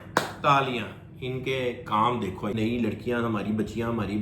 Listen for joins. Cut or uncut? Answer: cut